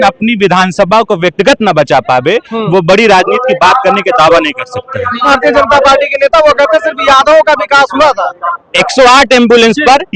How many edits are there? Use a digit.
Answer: 1